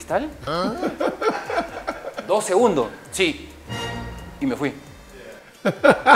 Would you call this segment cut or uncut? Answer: uncut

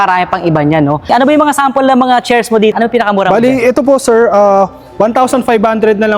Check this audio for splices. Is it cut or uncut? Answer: cut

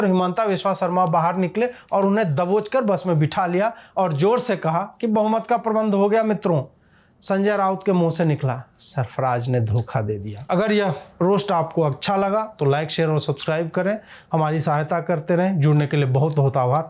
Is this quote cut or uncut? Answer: uncut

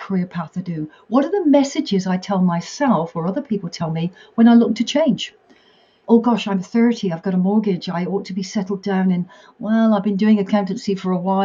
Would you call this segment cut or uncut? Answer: uncut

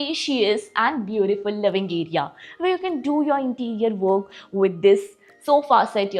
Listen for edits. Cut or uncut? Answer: uncut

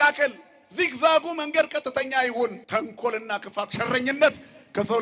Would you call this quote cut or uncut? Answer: cut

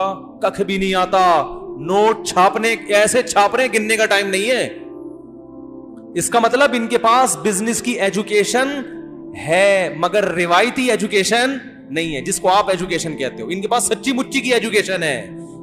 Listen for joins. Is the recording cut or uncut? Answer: uncut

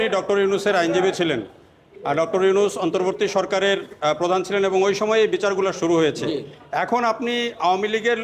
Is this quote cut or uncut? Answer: uncut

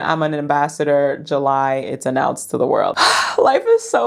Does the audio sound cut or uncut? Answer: cut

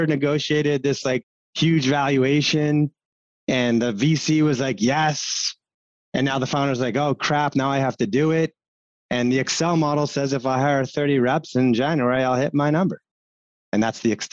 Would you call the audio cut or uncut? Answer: uncut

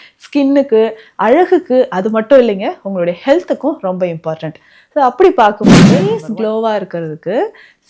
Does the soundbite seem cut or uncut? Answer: cut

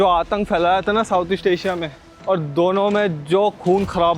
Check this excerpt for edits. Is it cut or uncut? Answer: cut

